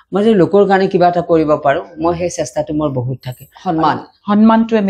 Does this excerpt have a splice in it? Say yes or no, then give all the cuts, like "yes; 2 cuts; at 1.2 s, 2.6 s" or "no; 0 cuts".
yes; 1 cut; at 3.6 s